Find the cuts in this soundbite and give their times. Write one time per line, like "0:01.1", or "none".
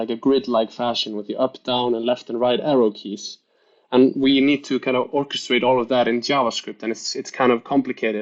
none